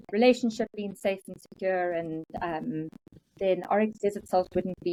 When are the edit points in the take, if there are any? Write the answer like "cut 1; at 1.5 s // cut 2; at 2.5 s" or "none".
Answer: none